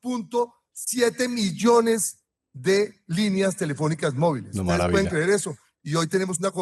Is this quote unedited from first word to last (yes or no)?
no